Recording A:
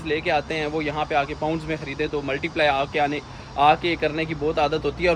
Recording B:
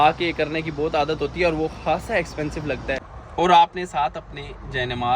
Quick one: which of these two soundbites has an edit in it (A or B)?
B